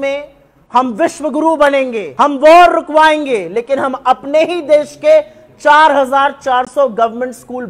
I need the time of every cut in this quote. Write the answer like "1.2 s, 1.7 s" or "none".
2.1 s